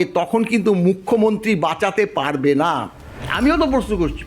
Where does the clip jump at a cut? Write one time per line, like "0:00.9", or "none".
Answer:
0:03.2